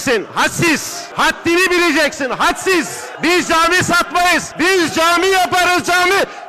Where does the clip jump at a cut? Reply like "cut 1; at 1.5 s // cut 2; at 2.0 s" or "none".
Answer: cut 1; at 1.0 s // cut 2; at 3.0 s // cut 3; at 4.5 s